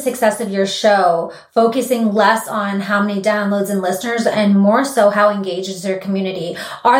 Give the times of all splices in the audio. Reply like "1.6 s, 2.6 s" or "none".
none